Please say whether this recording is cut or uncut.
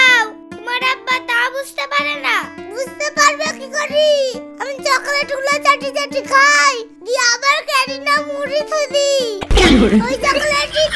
uncut